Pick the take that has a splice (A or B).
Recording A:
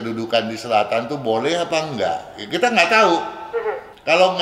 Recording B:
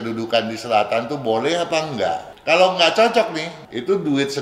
B